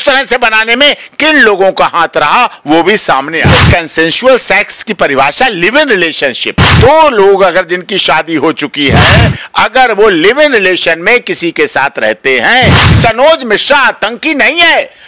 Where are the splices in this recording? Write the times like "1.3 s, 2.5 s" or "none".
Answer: 3.4 s, 6.7 s, 12.9 s